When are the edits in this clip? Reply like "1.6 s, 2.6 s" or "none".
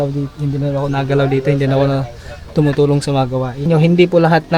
3.7 s